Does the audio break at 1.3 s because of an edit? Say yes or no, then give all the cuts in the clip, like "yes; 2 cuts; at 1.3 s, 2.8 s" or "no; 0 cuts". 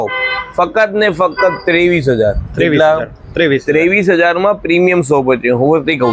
no; 0 cuts